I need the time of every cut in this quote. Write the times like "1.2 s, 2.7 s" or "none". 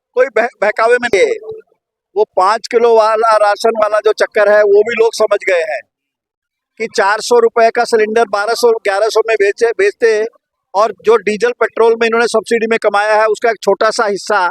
1.1 s